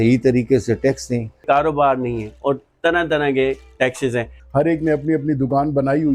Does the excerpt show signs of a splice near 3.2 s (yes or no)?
no